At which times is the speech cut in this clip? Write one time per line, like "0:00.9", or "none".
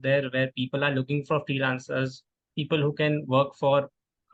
none